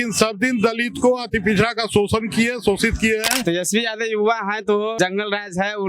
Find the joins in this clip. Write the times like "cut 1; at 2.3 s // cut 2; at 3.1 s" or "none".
cut 1; at 3.4 s // cut 2; at 4.9 s